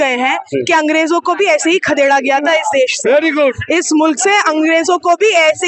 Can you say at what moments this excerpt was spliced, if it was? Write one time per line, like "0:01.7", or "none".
none